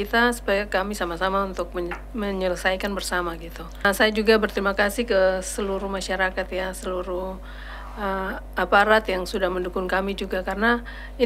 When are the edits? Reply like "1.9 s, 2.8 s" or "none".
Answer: 3.9 s